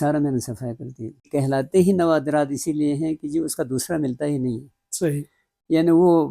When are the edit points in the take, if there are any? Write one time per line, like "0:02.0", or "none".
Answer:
0:01.3